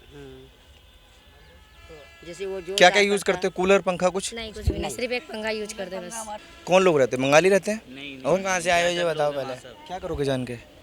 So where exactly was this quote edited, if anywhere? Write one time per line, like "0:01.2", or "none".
0:06.5